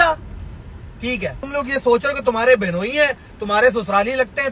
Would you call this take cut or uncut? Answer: cut